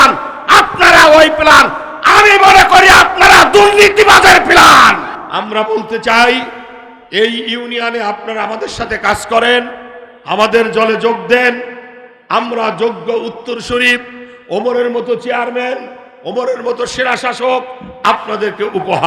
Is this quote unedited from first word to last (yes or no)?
no